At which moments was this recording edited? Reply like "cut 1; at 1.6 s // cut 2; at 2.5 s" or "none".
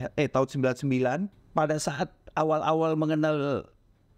cut 1; at 1.4 s